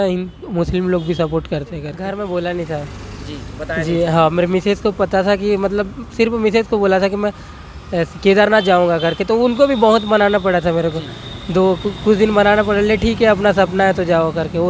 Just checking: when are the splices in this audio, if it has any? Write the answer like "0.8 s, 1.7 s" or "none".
1.9 s